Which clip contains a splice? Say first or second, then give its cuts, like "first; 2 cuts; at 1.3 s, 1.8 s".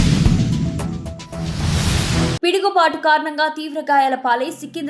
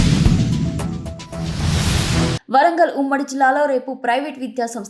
first; 1 cut; at 2.2 s